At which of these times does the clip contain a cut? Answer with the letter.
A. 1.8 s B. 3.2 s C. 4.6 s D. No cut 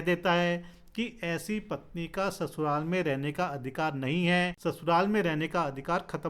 C